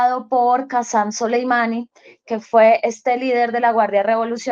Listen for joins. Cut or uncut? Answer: uncut